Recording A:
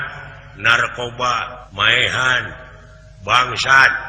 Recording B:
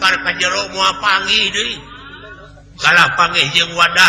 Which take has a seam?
A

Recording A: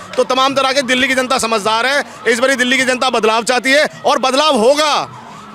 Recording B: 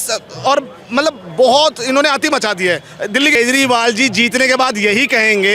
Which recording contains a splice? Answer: B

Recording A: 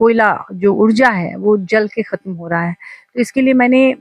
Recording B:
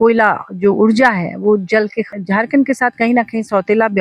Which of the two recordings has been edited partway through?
B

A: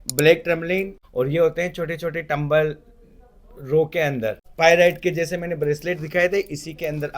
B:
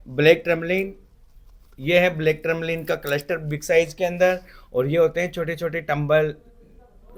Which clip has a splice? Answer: A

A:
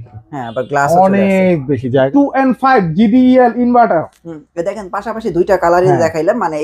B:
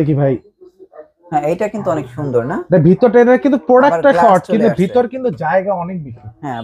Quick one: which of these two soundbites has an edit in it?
A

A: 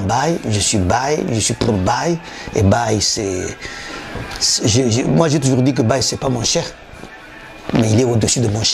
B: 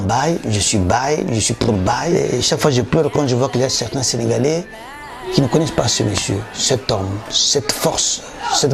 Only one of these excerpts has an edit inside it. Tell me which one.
B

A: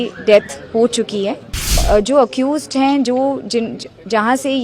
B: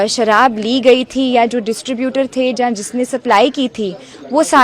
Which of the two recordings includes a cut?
A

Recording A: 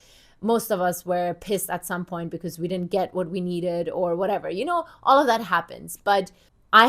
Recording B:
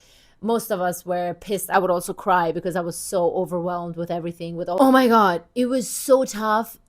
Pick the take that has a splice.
B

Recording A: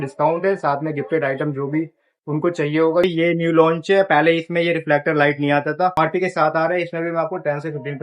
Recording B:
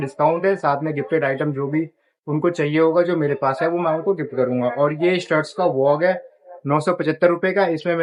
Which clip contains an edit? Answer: A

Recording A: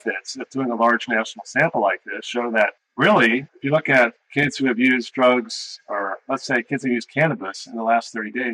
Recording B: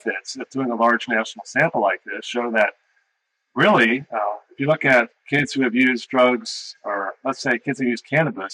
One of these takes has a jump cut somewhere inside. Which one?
A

